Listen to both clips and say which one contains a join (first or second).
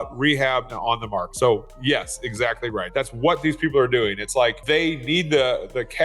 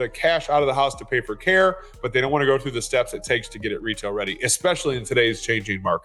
first